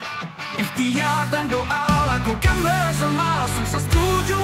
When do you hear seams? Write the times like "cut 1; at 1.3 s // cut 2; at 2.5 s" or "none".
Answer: none